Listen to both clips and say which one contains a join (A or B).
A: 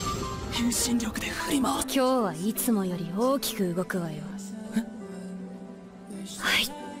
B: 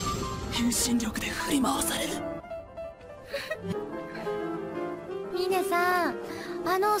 B